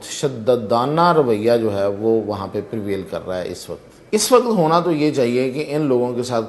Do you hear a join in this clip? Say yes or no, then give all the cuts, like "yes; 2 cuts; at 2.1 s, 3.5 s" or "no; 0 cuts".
yes; 1 cut; at 3.9 s